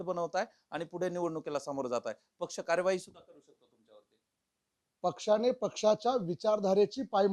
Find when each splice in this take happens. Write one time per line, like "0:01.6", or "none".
none